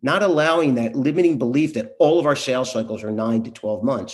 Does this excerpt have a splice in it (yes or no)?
no